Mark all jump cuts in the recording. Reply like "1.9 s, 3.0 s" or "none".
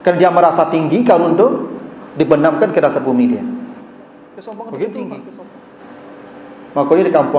5.4 s